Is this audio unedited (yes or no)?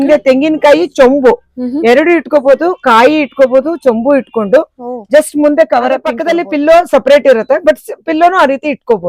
no